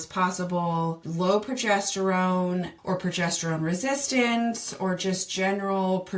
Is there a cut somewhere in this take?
yes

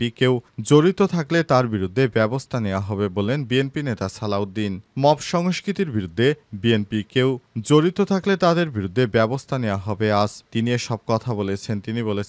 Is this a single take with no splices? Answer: yes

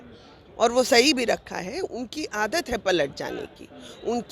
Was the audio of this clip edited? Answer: no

